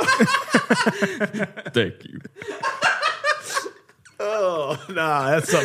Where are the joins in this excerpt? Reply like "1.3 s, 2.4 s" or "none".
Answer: 2.1 s